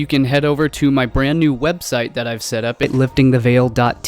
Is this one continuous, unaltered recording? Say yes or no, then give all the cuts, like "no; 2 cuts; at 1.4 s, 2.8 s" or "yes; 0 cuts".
no; 1 cut; at 2.8 s